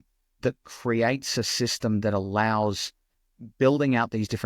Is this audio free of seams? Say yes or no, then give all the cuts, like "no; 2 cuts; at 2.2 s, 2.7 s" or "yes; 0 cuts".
yes; 0 cuts